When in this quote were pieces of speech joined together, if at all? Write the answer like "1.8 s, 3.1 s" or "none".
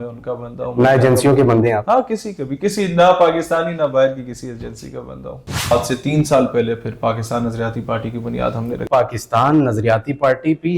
5.7 s, 8.8 s